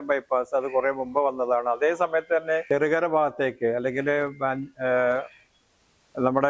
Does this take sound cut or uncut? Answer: cut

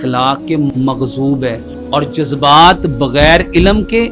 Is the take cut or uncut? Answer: cut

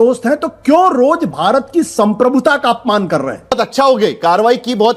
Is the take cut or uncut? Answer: cut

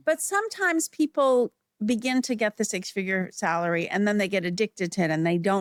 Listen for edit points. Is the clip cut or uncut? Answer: uncut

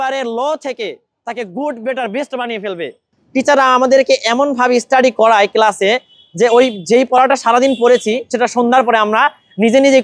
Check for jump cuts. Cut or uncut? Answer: cut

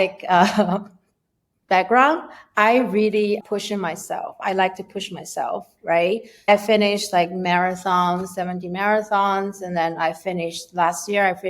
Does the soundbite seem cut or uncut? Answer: cut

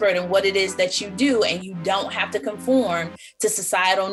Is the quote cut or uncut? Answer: uncut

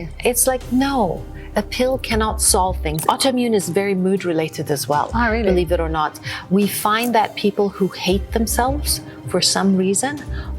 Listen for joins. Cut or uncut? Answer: cut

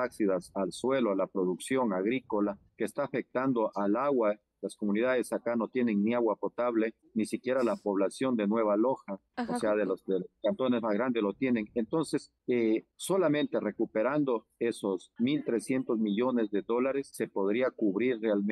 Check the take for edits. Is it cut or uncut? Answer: uncut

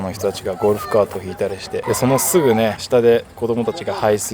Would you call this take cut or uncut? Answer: cut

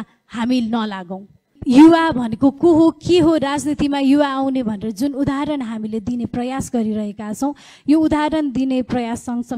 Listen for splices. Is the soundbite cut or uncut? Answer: cut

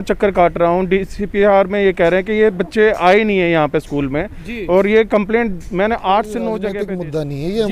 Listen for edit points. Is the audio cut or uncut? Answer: cut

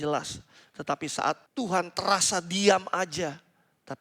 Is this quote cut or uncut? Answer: cut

